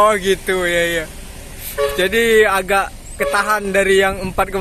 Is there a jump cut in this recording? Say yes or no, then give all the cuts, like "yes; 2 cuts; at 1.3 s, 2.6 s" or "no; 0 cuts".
no; 0 cuts